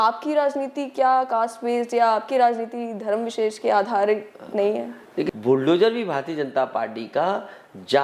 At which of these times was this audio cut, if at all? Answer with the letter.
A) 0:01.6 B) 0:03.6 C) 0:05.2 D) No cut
C